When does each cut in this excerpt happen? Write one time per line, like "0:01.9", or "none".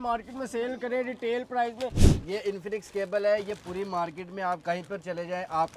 0:02.1